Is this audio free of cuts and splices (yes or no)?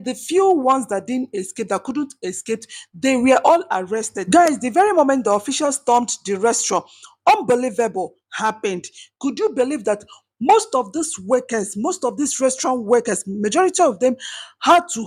yes